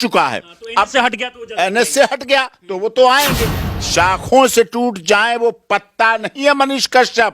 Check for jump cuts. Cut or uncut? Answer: cut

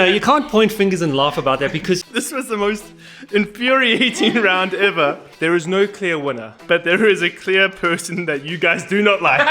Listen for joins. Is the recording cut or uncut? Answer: cut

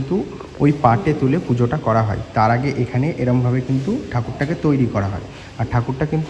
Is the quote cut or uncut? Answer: uncut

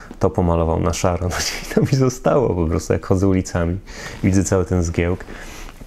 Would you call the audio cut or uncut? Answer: uncut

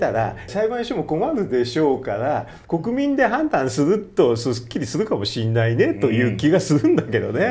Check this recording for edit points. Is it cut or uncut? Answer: uncut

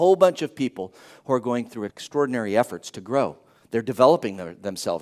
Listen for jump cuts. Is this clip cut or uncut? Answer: cut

